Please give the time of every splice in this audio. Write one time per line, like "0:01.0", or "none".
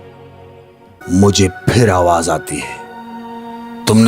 0:00.9